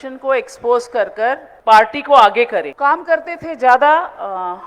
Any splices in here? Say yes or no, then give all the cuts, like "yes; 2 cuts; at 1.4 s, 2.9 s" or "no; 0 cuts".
yes; 2 cuts; at 1.5 s, 2.7 s